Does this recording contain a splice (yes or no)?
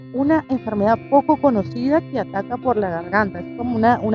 no